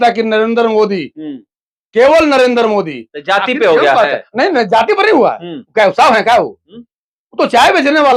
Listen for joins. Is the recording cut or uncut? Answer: uncut